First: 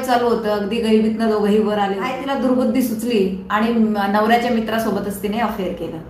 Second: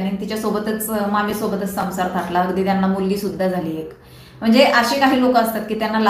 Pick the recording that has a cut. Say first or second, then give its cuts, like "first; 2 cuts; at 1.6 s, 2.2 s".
first; 1 cut; at 2.2 s